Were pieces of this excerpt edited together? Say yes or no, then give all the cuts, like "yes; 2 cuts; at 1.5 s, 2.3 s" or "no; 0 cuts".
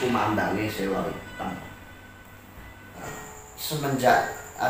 yes; 1 cut; at 3.1 s